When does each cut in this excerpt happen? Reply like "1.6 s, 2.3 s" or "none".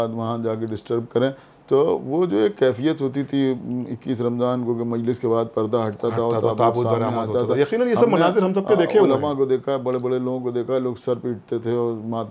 none